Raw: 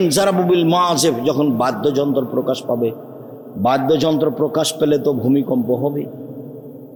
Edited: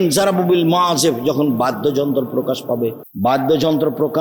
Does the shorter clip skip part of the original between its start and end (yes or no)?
yes